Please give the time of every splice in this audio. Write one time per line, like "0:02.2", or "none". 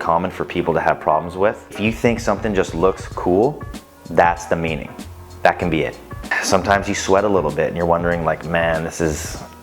0:01.8
0:06.4